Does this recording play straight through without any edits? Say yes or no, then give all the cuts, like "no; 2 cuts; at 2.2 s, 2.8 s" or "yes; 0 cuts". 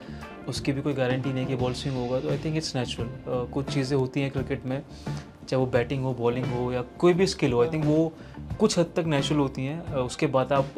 yes; 0 cuts